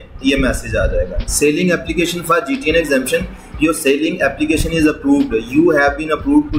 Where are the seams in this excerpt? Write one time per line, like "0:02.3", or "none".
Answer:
none